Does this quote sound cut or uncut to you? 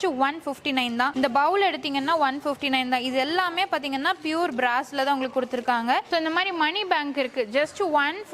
cut